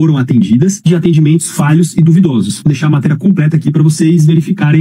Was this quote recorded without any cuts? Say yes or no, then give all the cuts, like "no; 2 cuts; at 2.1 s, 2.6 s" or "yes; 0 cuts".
yes; 0 cuts